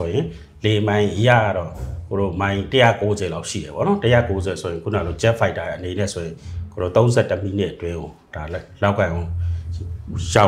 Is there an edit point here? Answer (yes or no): no